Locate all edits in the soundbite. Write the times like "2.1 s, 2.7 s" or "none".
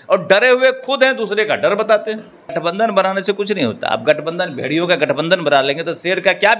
2.6 s